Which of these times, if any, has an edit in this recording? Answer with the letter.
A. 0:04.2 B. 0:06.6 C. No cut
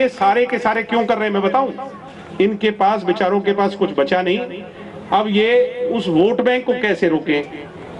C